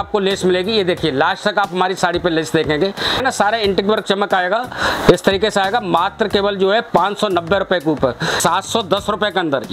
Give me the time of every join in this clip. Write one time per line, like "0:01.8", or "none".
0:03.2
0:08.3